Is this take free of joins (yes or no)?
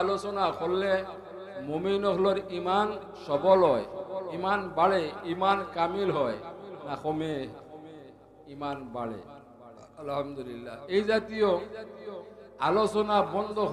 yes